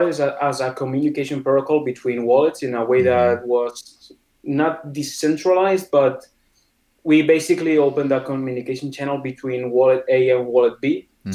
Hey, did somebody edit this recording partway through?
no; 0 cuts

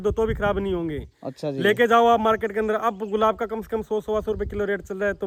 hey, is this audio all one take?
yes; 0 cuts

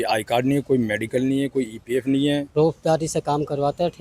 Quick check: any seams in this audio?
yes; 1 cut; at 2.5 s

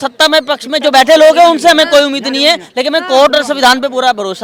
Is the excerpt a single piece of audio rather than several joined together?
yes; 0 cuts

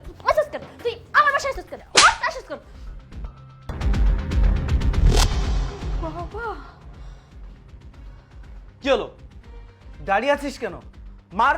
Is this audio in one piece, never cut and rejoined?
no; 2 cuts; at 1.7 s, 3.7 s

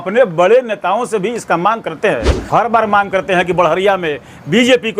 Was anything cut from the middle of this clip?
yes; 1 cut; at 2.4 s

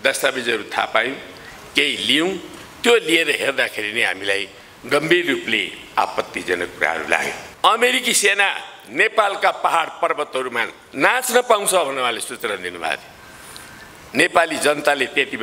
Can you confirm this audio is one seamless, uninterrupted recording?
no; 1 cut; at 7.4 s

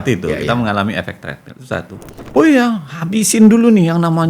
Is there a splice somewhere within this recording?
yes; 1 cut; at 2.2 s

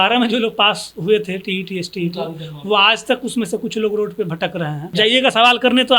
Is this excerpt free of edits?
no; 1 cut; at 4.9 s

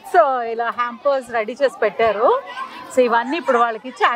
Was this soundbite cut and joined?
no; 0 cuts

